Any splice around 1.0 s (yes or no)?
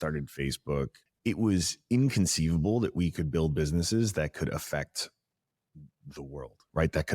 yes